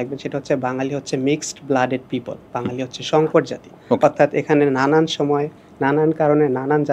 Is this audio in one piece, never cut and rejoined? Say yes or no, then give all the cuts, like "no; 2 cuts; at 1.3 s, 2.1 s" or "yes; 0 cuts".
yes; 0 cuts